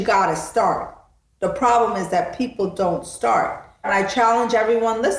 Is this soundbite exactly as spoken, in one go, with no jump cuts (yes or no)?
no